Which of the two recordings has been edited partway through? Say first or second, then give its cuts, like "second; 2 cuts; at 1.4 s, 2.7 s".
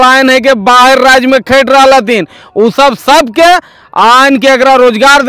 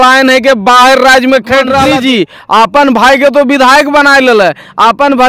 second; 1 cut; at 1.9 s